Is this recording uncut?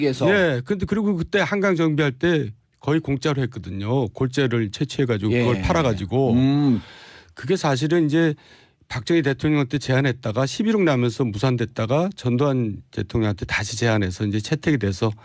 no; 1 cut; at 7.7 s

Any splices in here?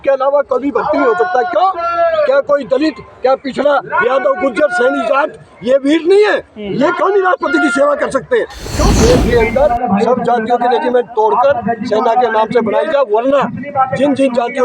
yes; 1 cut; at 8.7 s

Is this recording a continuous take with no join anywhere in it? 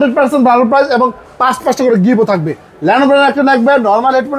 yes; 0 cuts

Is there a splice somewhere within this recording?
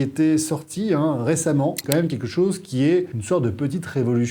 yes; 2 cuts; at 1.8 s, 3.2 s

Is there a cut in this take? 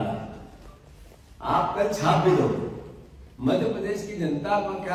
no; 0 cuts

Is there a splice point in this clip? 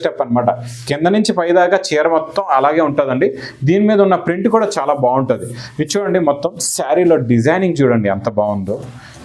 no; 0 cuts

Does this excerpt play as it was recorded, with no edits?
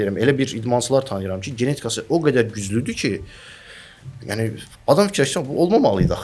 yes; 0 cuts

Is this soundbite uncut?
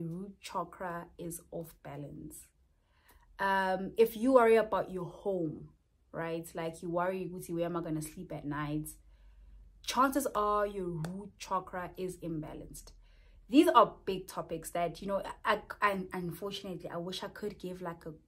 yes; 0 cuts

